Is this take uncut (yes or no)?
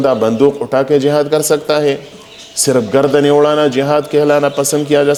yes